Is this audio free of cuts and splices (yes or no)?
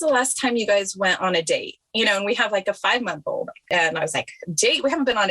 no